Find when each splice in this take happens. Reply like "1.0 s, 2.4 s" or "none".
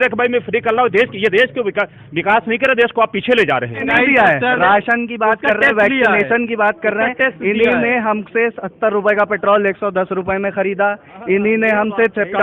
3.9 s

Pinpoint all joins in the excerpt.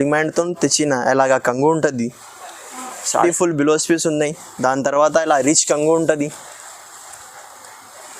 3.2 s

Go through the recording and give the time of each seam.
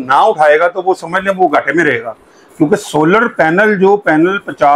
none

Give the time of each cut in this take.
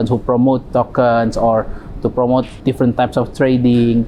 2.5 s

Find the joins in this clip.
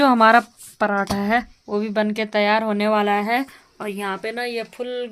none

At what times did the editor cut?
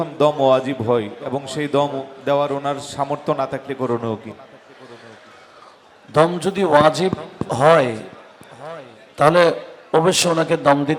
none

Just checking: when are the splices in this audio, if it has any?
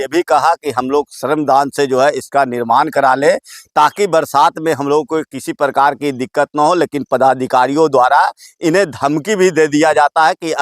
none

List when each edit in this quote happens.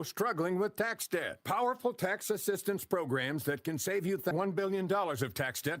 4.3 s

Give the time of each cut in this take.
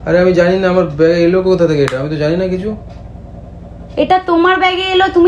none

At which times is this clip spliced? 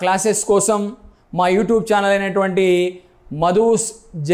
none

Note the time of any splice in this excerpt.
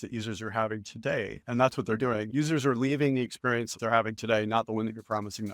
3.8 s

